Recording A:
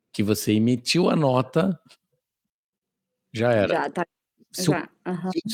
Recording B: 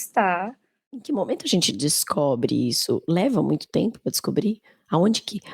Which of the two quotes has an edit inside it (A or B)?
B